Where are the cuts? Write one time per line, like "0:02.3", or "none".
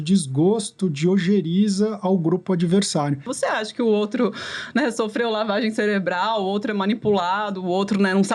0:03.3